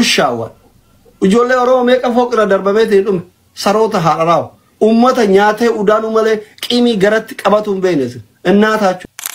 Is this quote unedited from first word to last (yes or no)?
yes